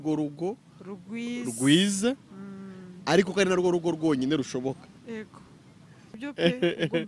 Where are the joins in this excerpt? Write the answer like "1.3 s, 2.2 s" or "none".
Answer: 6.2 s